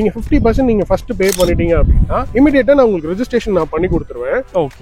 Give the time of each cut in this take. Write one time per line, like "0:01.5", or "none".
none